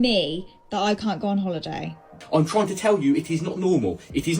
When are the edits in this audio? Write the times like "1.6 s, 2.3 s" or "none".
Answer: 2.2 s